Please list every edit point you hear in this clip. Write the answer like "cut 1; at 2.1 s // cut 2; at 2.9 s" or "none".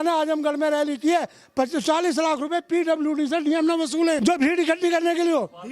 cut 1; at 4.2 s